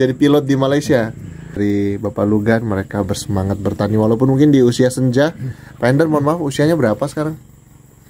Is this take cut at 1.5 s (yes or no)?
yes